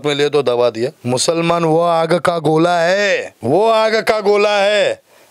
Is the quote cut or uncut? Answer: cut